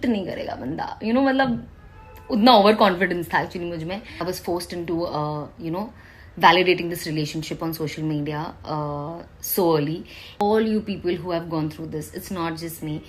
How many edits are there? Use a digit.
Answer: 2